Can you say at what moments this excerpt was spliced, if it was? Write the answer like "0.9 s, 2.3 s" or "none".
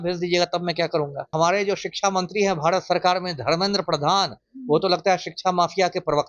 1.3 s